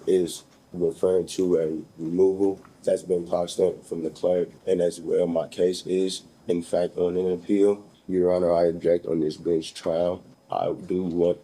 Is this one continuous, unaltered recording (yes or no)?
no